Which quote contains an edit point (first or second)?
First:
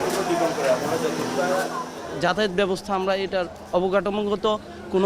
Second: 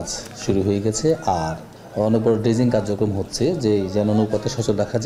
first